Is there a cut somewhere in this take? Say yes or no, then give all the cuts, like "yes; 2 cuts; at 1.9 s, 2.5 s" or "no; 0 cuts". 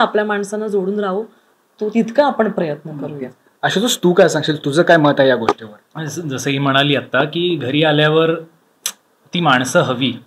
no; 0 cuts